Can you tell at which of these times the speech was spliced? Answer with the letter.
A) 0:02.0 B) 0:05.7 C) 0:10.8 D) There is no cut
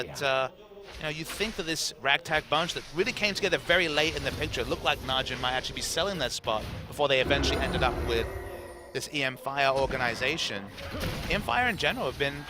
B